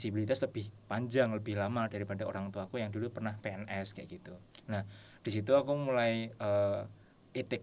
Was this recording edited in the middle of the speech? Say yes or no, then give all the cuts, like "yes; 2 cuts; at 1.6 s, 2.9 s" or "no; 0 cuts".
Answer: no; 0 cuts